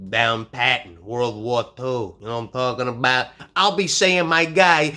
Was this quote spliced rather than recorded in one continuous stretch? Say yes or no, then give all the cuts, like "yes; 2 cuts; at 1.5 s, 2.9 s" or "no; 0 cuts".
yes; 1 cut; at 3.5 s